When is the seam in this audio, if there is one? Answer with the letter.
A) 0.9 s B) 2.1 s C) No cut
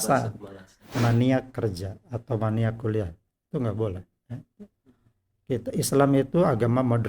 A